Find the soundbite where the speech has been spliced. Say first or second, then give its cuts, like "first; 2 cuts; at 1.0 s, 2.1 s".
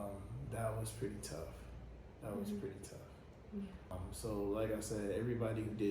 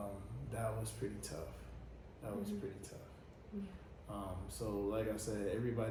first; 1 cut; at 3.9 s